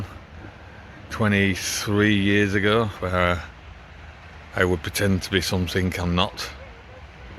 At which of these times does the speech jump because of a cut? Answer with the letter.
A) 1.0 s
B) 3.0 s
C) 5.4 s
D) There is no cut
B